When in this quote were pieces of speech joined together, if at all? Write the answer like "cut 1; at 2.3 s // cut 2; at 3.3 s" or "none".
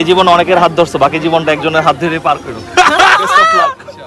none